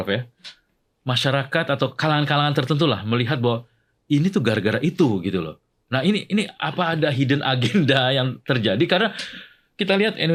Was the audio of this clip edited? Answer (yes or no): no